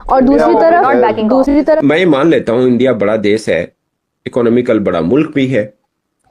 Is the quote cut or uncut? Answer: cut